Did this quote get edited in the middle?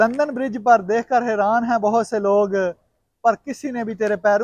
no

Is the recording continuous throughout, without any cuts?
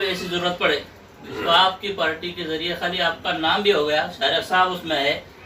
yes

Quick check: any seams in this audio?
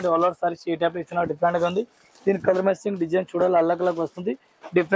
no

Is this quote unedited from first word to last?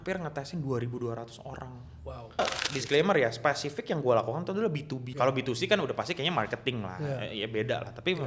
no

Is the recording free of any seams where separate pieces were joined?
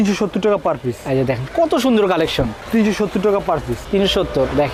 yes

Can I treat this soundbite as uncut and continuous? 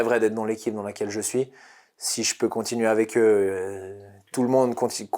yes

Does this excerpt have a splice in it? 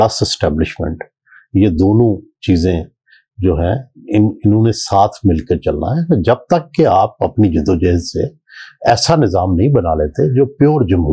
no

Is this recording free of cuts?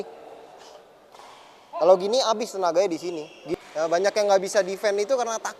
no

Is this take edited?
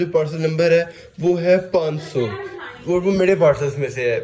no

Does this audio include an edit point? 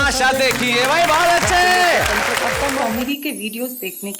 yes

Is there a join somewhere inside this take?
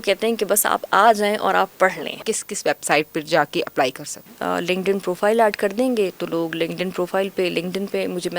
yes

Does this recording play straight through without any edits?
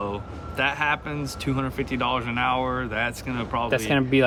yes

